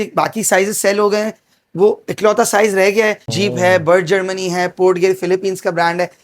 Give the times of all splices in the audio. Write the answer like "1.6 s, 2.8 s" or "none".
3.2 s